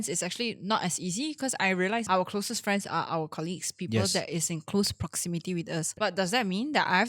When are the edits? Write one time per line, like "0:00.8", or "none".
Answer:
0:02.1
0:05.9